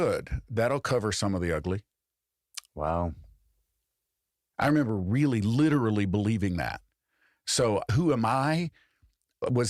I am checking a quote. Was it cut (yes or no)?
yes